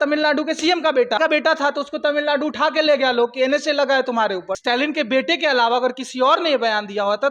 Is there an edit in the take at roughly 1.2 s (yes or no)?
yes